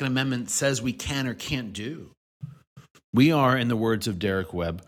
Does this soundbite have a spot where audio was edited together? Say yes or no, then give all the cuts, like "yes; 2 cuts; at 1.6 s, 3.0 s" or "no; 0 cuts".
no; 0 cuts